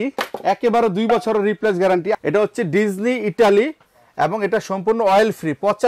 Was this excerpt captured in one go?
no; 1 cut; at 2.1 s

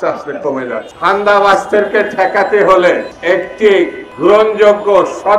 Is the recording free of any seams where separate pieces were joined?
no; 3 cuts; at 0.9 s, 3.1 s, 4.0 s

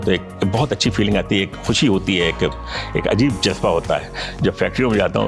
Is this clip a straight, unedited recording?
yes; 0 cuts

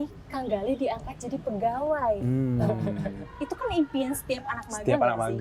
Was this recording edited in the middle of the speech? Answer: no; 0 cuts

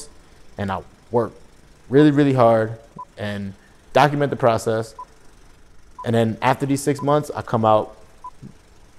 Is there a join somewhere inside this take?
no; 0 cuts

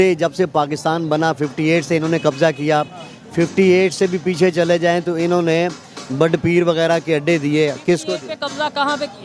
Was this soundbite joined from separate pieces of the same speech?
no; 0 cuts

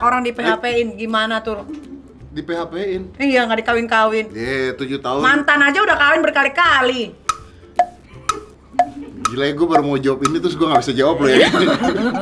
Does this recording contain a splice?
no; 0 cuts

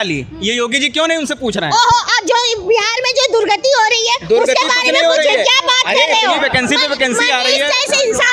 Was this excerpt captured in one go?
yes; 0 cuts

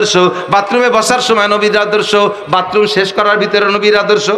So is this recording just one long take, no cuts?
yes; 0 cuts

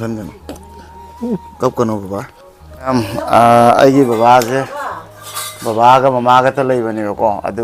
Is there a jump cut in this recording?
yes; 1 cut; at 2.9 s

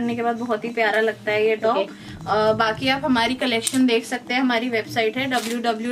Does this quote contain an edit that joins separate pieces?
no; 0 cuts

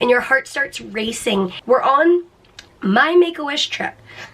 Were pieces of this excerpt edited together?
yes; 1 cut; at 1.6 s

